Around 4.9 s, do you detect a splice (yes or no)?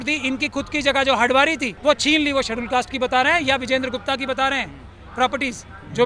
no